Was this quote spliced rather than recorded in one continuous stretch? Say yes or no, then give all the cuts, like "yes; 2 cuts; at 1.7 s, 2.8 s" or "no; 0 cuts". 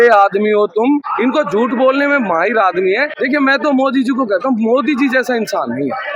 yes; 2 cuts; at 1.1 s, 3.1 s